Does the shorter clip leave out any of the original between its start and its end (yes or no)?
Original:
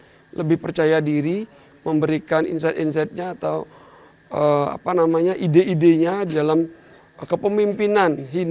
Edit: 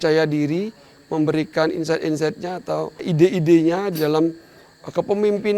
yes